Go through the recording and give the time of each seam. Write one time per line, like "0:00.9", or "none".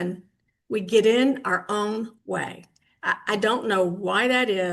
none